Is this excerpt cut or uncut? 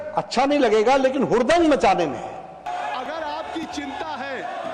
cut